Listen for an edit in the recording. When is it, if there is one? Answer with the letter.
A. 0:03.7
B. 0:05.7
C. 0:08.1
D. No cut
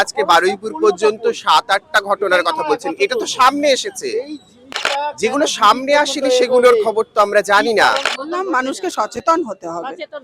C